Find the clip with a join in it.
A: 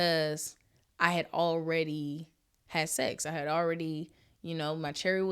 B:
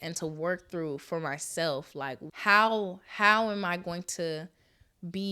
B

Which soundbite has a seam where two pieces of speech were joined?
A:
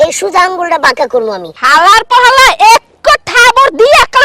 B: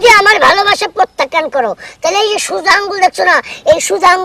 A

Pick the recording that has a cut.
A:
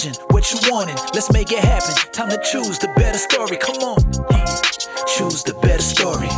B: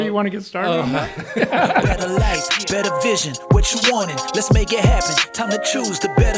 B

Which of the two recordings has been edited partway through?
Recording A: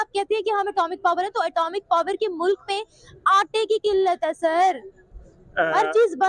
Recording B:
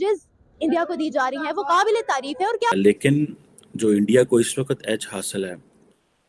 B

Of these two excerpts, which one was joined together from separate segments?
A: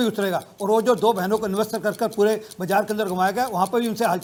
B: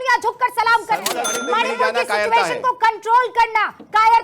B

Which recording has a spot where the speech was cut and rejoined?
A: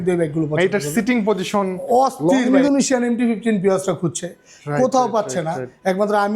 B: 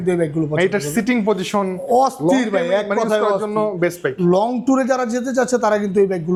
A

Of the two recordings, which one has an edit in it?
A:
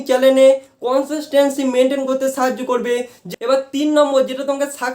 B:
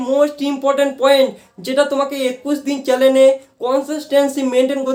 A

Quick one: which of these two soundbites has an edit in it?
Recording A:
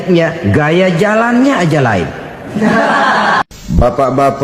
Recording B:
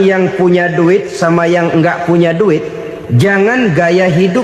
A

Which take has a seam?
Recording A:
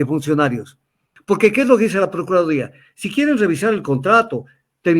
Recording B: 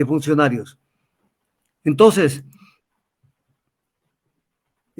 A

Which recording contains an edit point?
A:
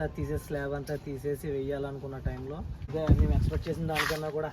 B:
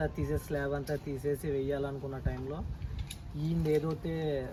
A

